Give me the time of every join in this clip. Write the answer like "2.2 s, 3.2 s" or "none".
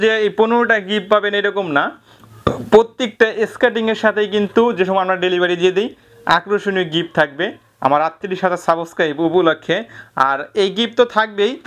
none